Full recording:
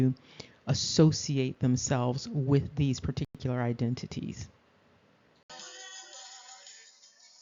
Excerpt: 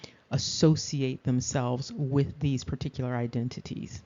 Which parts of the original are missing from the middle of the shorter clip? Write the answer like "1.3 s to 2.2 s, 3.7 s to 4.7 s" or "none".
3.3 s to 3.4 s